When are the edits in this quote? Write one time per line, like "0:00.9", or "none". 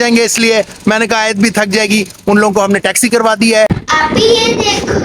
0:03.8